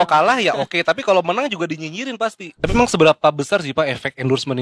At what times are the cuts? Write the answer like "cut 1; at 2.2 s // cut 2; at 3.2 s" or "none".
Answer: cut 1; at 2.6 s